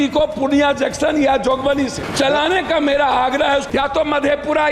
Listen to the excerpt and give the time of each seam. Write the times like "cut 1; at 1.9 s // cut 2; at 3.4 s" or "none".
cut 1; at 2.0 s // cut 2; at 3.7 s